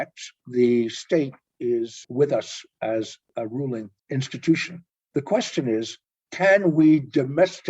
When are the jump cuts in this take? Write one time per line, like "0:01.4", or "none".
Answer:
0:02.0
0:03.6